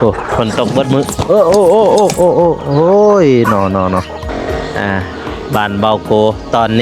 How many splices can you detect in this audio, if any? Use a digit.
1